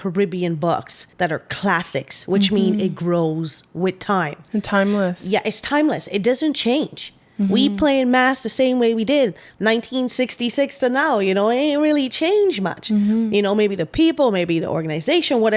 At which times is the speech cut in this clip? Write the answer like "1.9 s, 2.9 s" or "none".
1.0 s